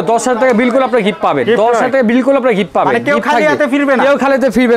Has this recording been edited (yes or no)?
no